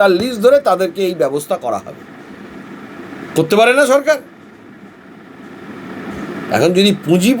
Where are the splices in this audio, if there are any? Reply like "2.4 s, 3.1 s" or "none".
none

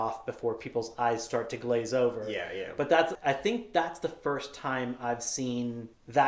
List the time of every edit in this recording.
none

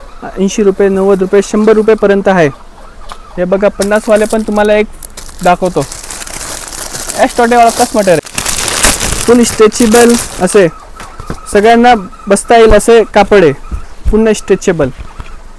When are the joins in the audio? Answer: none

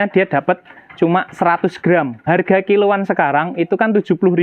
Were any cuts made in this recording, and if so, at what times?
2.2 s

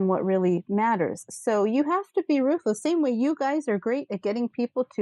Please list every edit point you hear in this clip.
none

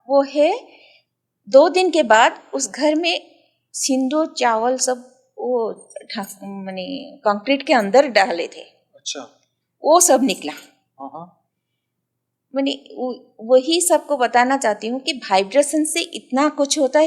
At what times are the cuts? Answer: none

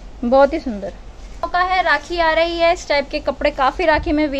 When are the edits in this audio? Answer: 1.5 s

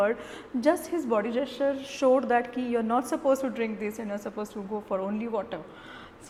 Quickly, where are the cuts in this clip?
none

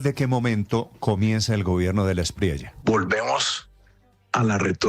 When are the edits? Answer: 2.7 s

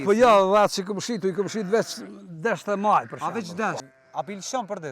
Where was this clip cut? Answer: 3.9 s

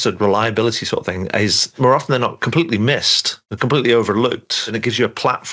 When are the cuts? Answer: 1.7 s, 4.6 s

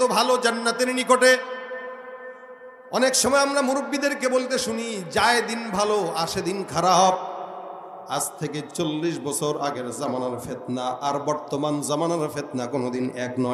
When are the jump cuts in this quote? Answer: none

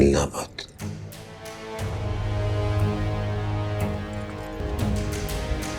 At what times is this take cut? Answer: none

